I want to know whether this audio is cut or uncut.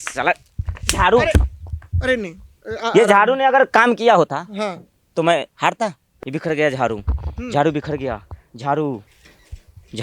cut